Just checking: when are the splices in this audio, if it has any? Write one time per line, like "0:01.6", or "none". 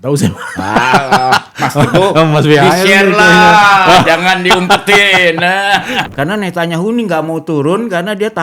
0:06.1